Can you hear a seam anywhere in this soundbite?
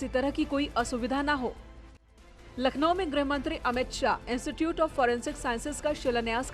yes; 1 cut; at 2.0 s

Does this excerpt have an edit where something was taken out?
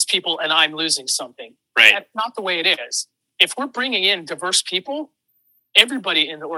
no; 0 cuts

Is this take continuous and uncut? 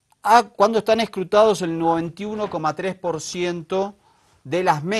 no; 1 cut; at 2.2 s

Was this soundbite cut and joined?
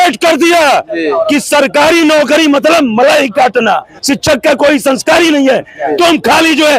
yes; 1 cut; at 3.9 s

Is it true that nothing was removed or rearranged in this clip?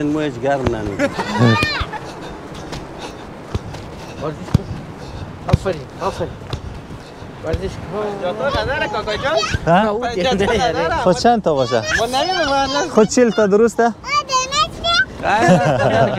yes; 0 cuts

